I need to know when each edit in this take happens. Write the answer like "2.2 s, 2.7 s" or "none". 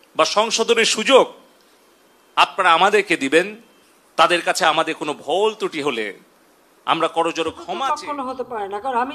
7.6 s